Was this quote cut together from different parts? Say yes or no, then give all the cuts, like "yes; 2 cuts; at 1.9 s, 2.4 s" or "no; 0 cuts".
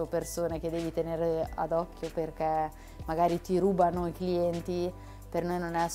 no; 0 cuts